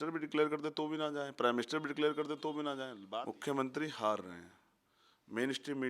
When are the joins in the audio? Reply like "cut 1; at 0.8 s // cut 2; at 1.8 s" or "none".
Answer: cut 1; at 2.9 s